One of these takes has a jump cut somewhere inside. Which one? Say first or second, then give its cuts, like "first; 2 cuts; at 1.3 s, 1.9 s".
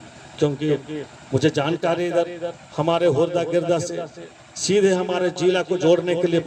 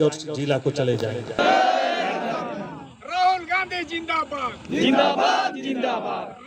second; 1 cut; at 1.4 s